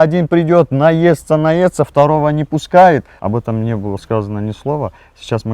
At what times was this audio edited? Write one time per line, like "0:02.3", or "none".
0:03.1

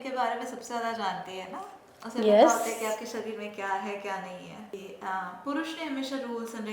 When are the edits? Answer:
0:04.7

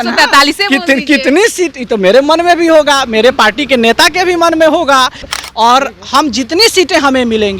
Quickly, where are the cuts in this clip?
0:05.2

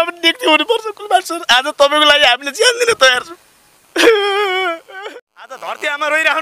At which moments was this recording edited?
0:04.9

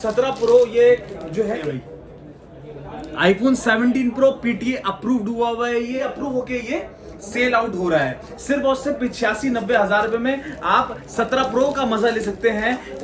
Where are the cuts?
0:01.6
0:06.0

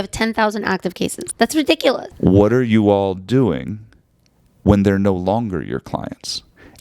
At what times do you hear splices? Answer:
0:01.2
0:02.1

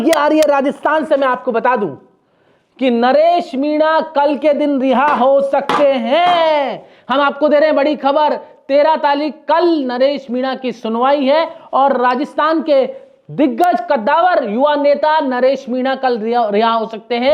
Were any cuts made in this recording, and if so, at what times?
none

